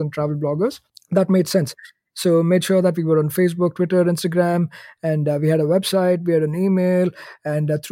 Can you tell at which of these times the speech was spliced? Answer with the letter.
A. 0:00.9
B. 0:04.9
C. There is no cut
A